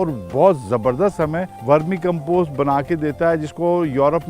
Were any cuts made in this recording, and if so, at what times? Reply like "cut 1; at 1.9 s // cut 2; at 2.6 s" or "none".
cut 1; at 1.5 s

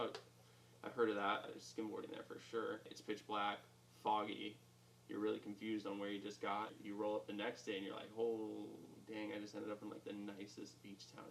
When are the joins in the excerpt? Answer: cut 1; at 1.6 s // cut 2; at 2.9 s // cut 3; at 6.8 s

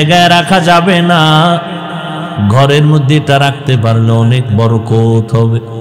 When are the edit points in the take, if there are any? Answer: none

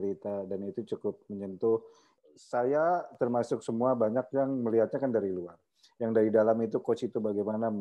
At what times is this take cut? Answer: cut 1; at 2.1 s

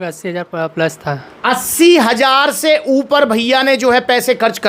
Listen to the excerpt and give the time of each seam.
none

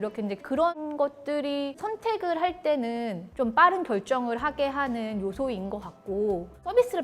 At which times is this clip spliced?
none

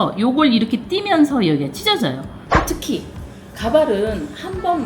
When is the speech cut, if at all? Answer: cut 1; at 2.3 s

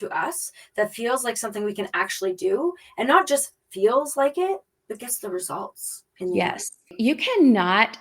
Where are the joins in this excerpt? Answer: cut 1; at 4.7 s // cut 2; at 6.9 s

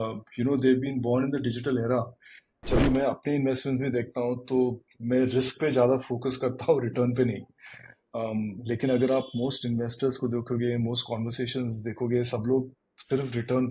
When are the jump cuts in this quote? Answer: cut 1; at 2.6 s

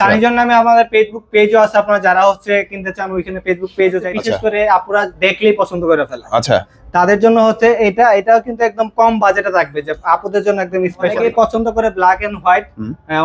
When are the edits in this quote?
cut 1; at 4.0 s // cut 2; at 11.2 s

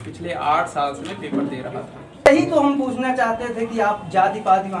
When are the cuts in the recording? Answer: cut 1; at 2.3 s

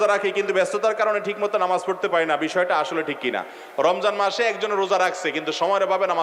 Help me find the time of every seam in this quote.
none

